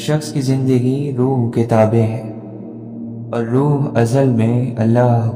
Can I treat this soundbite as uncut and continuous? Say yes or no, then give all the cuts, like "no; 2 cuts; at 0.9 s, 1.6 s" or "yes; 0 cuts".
yes; 0 cuts